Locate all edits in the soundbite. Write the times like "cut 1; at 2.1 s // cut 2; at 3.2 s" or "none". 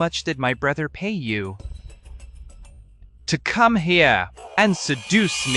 none